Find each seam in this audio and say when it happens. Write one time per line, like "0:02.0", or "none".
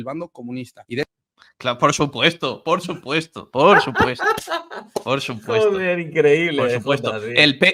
none

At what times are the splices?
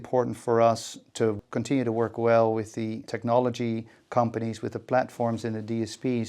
0:01.4
0:03.0

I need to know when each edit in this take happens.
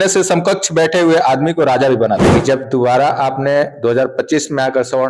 0:02.2

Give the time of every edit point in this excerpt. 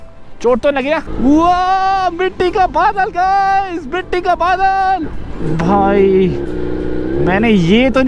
0:01.1

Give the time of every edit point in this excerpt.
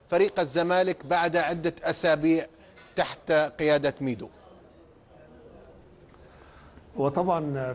0:05.0

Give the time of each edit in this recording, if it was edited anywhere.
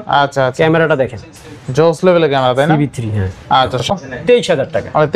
0:03.9

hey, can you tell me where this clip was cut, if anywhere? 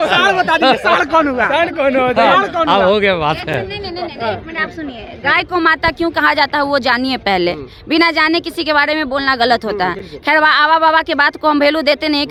none

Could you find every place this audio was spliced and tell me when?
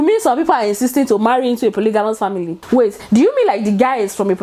none

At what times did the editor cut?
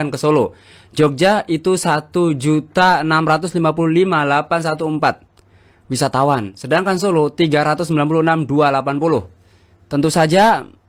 none

